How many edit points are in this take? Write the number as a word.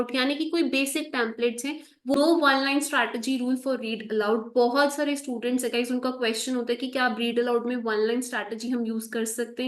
one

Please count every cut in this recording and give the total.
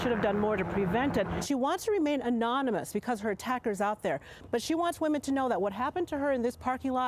two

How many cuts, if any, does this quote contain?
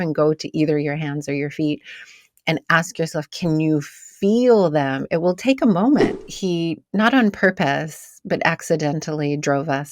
one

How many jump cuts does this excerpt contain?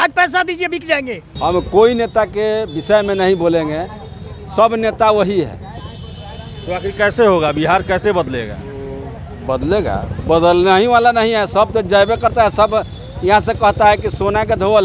one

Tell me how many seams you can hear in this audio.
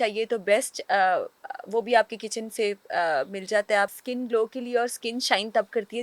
one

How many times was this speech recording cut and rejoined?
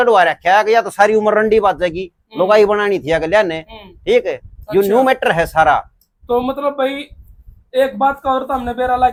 zero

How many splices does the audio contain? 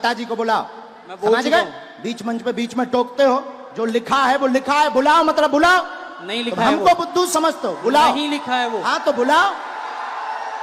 zero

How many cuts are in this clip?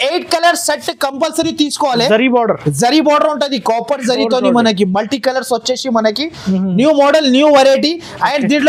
zero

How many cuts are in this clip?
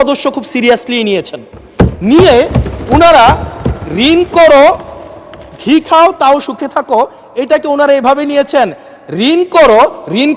zero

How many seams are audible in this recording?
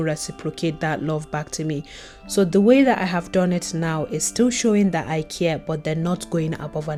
zero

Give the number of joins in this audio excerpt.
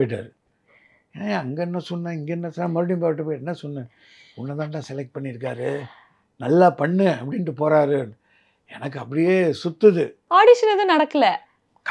one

